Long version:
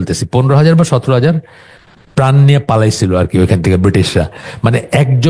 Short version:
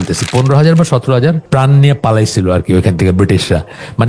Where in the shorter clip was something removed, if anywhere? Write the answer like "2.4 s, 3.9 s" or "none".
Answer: 1.4 s